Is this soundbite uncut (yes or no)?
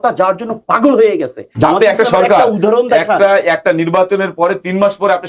no